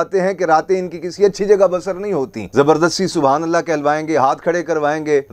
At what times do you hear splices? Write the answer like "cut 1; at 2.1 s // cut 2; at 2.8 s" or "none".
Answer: cut 1; at 2.5 s